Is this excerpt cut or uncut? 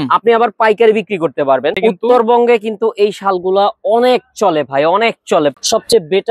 cut